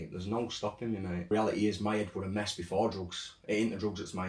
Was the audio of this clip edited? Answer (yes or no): yes